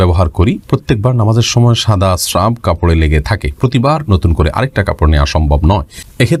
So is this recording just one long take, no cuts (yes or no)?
yes